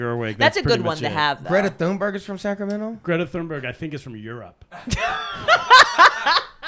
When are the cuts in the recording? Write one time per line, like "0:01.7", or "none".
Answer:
none